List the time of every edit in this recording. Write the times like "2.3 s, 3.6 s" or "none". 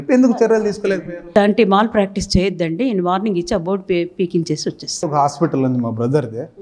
1.3 s, 5.1 s